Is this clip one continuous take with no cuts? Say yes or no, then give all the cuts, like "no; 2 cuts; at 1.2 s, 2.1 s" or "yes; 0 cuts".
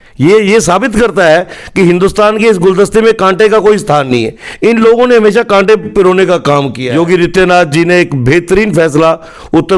no; 1 cut; at 6.8 s